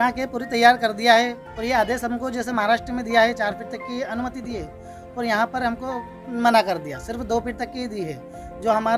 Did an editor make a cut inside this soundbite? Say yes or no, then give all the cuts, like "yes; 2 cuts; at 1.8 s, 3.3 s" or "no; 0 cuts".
no; 0 cuts